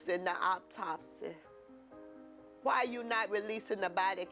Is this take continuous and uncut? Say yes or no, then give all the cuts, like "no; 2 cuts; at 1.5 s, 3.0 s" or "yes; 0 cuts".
yes; 0 cuts